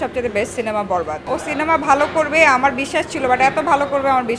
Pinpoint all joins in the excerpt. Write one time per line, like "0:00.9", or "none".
0:01.3